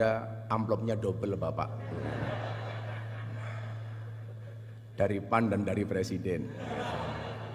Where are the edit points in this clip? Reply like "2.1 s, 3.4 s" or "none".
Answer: none